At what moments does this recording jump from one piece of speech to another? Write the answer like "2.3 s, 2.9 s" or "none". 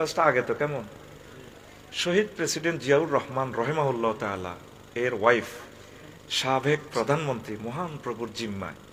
none